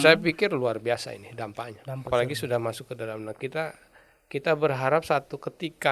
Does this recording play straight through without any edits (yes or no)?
no